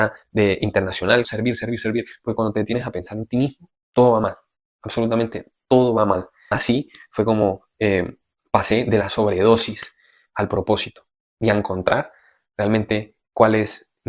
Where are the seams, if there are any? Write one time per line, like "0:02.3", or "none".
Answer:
0:01.3
0:06.4